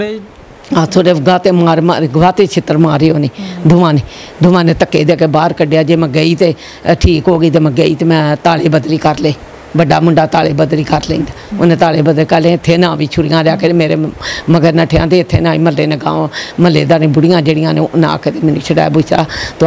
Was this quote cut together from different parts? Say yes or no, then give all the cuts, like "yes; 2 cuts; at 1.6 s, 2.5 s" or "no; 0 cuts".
no; 0 cuts